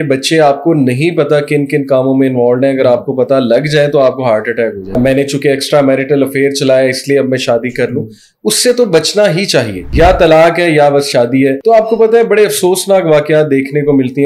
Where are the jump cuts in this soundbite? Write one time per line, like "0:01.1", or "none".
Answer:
0:05.0
0:09.8
0:11.6